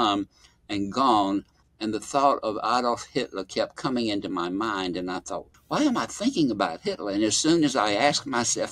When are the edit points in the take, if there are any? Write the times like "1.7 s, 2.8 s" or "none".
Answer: 1.6 s, 5.4 s